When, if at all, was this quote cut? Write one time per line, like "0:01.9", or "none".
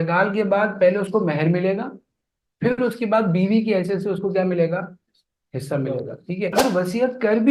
0:06.6

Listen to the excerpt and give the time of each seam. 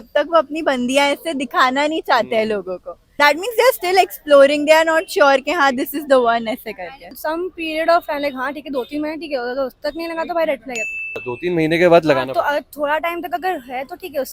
none

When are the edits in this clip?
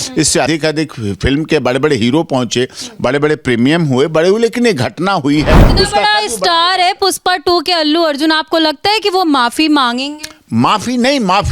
0:05.7

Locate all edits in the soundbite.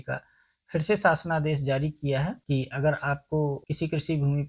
0:02.4
0:03.7

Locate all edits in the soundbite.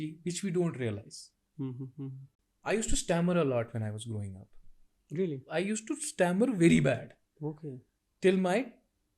0:02.3

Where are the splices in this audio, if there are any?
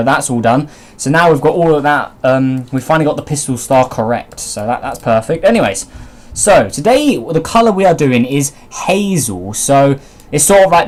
none

